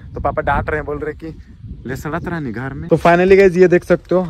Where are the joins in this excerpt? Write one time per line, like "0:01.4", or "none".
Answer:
0:02.9